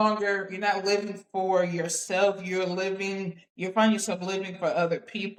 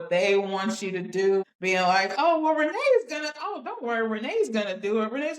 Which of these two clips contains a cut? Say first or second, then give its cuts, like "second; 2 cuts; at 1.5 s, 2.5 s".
second; 1 cut; at 1.5 s